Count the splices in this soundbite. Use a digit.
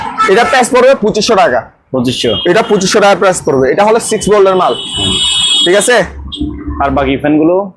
0